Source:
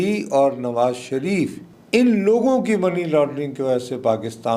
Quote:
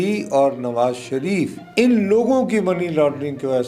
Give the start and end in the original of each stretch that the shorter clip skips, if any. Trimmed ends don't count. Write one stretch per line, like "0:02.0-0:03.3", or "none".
0:01.6-0:01.8